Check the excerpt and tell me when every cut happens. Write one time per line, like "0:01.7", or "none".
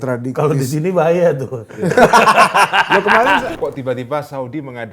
0:03.5